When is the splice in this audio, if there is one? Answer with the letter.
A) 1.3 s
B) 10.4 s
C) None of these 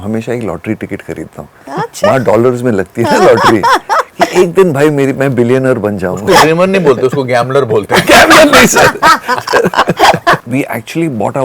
B